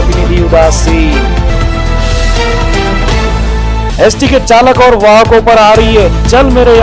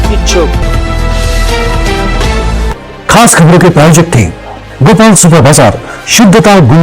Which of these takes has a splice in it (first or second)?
second